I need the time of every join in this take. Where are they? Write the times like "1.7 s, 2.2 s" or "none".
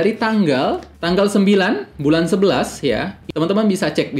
0.9 s, 3.2 s